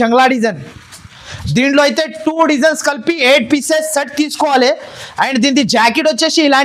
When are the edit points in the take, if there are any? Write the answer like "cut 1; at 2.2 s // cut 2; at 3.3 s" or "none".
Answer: none